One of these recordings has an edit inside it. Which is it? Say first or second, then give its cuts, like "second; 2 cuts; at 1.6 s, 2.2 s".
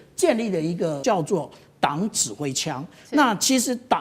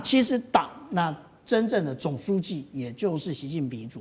first; 1 cut; at 1.0 s